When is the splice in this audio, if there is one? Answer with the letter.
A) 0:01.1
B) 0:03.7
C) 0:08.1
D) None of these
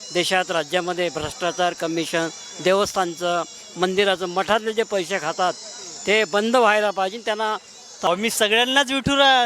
C